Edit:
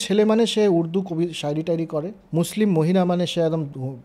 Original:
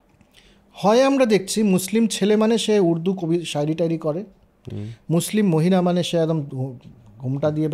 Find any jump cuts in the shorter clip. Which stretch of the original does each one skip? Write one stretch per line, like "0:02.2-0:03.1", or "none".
0:04.3-0:05.0